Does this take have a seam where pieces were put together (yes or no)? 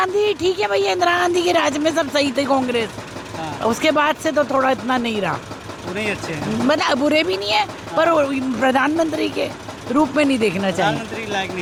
no